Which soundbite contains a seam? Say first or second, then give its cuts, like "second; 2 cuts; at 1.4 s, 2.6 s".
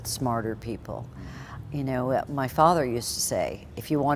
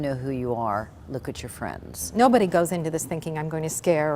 second; 1 cut; at 2.0 s